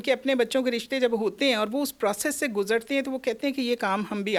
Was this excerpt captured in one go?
yes; 0 cuts

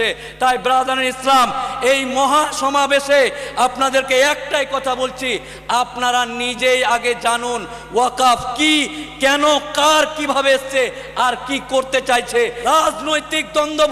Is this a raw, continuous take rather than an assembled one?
no; 1 cut; at 12.6 s

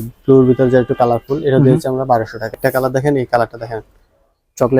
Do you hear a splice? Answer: yes; 1 cut; at 2.5 s

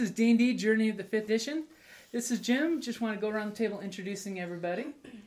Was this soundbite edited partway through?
yes; 1 cut; at 1.2 s

